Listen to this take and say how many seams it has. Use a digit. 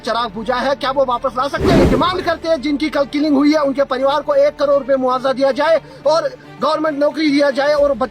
1